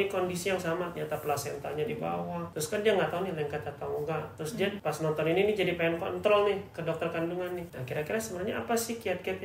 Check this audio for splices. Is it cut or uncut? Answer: cut